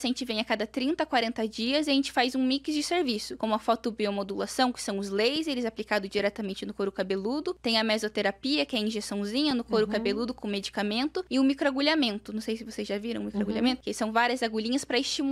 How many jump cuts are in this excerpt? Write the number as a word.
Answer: four